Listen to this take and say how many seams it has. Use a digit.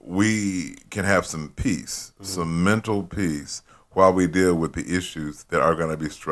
0